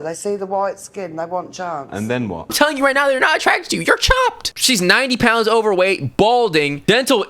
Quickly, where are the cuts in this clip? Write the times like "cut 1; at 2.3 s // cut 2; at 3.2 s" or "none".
cut 1; at 2.5 s // cut 2; at 4.5 s